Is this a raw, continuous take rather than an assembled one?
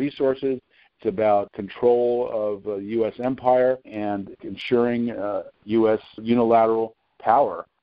no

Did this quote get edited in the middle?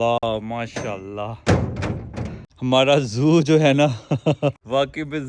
no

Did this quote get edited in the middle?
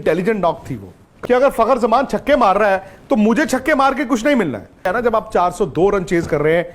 yes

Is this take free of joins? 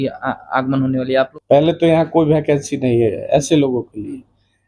no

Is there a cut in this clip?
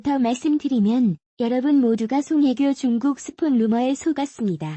no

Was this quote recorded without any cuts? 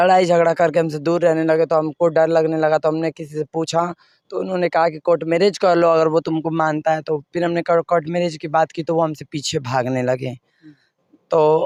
yes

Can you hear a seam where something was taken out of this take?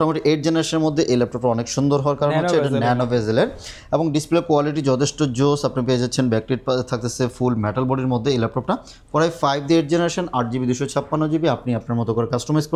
no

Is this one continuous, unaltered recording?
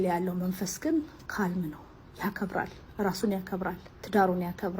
no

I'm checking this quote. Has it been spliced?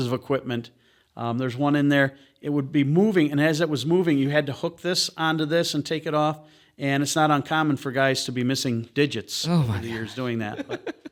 no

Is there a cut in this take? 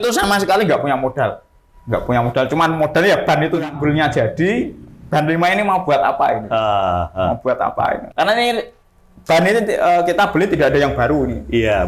yes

